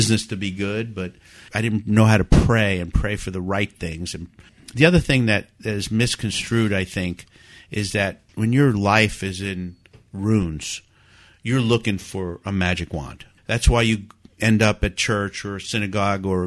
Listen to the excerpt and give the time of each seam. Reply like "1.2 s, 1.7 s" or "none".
1.5 s, 4.5 s, 8.2 s, 13.3 s

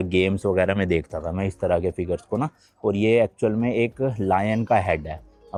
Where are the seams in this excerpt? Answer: none

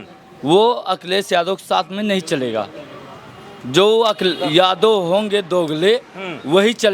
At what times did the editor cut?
none

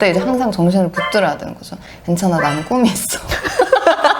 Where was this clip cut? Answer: none

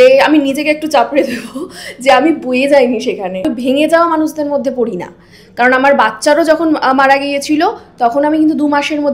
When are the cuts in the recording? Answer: 3.5 s

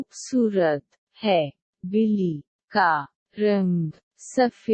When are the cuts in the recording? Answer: 1.6 s

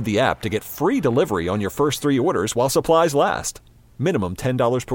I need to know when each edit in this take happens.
none

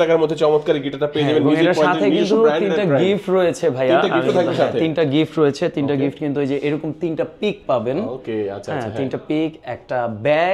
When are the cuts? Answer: none

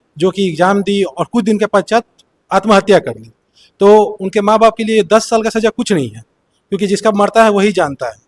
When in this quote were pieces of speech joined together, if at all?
none

